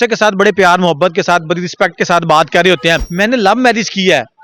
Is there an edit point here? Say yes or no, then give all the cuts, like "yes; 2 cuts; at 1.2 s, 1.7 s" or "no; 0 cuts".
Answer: yes; 1 cut; at 3.1 s